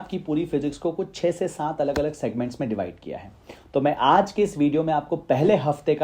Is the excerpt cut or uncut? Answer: uncut